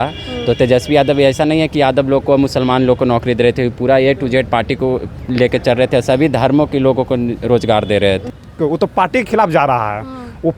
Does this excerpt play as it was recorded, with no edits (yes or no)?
no